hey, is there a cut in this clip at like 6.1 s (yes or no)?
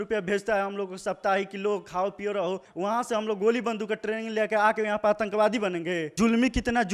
yes